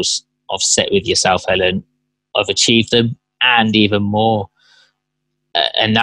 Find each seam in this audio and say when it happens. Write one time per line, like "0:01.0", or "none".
none